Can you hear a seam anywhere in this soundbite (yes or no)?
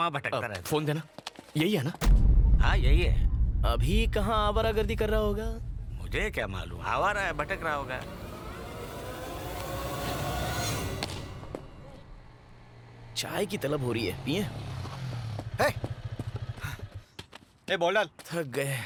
no